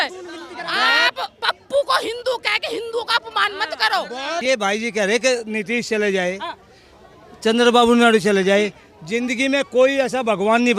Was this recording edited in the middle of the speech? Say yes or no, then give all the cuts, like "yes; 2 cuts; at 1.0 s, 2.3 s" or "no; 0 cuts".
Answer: yes; 1 cut; at 4.4 s